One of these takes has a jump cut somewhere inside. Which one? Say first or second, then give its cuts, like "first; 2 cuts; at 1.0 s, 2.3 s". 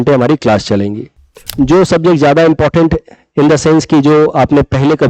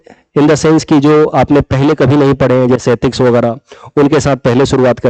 first; 1 cut; at 1.5 s